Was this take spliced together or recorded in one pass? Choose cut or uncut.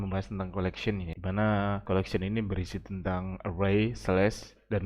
cut